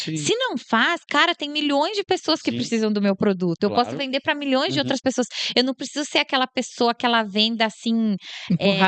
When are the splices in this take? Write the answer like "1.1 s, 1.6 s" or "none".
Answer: none